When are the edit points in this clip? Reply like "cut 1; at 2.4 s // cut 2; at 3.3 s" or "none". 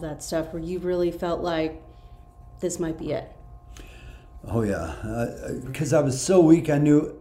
cut 1; at 5.8 s